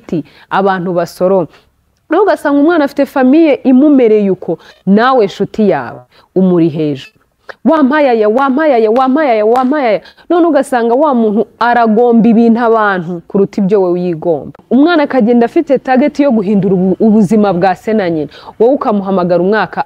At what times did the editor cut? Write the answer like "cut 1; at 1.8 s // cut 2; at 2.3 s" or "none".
cut 1; at 14.5 s